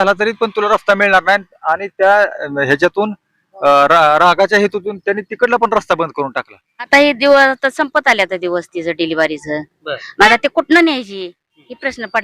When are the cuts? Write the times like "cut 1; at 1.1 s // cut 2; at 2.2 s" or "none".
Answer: cut 1; at 6.9 s

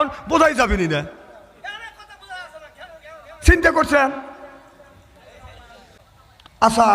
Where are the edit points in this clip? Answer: cut 1; at 6.0 s

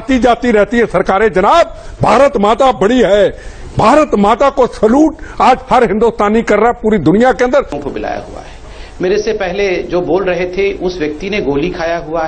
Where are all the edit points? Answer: cut 1; at 7.8 s

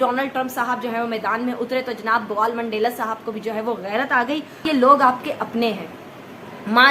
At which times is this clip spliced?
cut 1; at 4.7 s

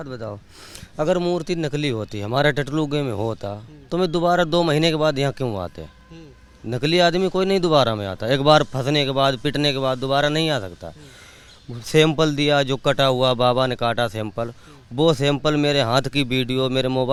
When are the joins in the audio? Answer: none

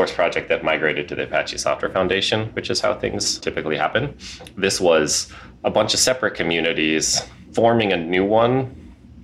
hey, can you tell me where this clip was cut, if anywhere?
cut 1; at 3.4 s // cut 2; at 7.5 s

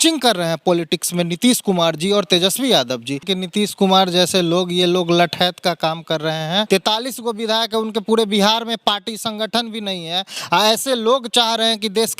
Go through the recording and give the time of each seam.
cut 1; at 3.2 s // cut 2; at 6.7 s

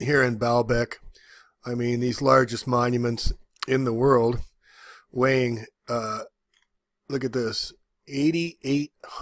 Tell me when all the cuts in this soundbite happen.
cut 1; at 3.2 s

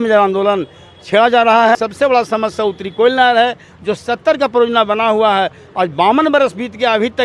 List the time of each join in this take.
cut 1; at 1.8 s

